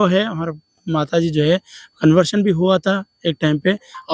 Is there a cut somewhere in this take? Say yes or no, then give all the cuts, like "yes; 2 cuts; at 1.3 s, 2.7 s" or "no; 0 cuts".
no; 0 cuts